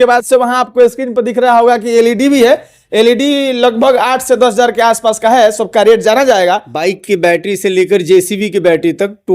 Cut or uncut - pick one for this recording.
cut